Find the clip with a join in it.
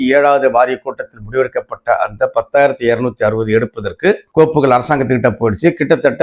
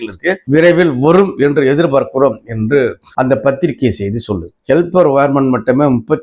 second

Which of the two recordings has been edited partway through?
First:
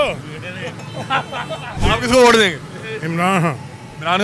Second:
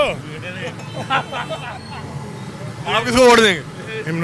first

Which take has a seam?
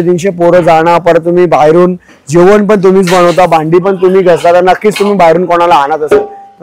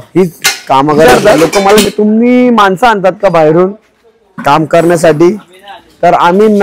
second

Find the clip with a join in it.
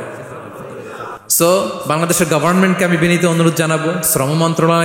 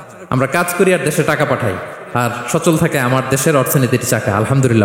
first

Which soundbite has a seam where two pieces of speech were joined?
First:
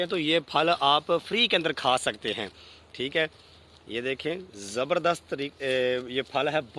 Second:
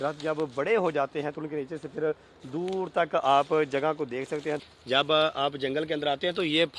second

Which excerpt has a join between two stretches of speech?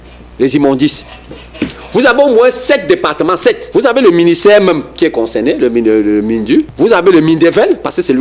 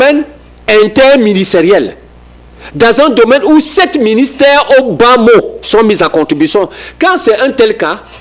first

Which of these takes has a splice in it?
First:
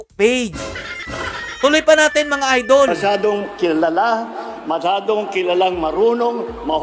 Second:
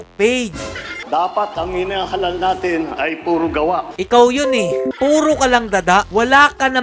second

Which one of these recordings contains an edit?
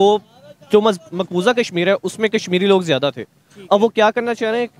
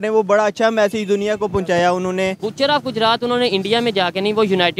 second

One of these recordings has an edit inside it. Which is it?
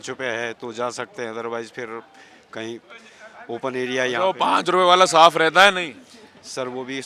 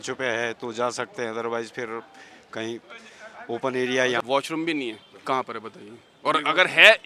second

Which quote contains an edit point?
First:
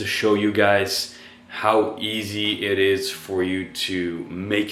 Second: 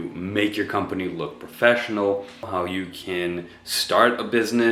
second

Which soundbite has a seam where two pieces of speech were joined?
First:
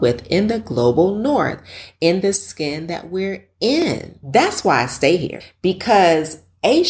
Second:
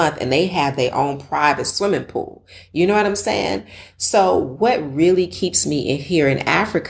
first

